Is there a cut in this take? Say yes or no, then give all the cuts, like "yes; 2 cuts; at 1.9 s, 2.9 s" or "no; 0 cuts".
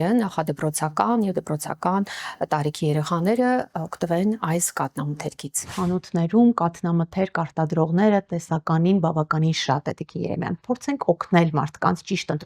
yes; 1 cut; at 5.6 s